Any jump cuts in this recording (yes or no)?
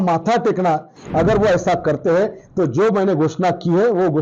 yes